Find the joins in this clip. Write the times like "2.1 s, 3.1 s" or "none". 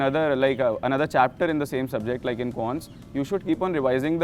none